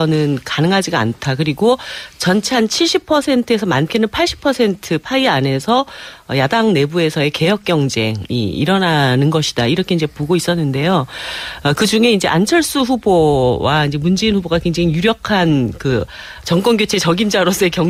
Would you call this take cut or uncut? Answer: uncut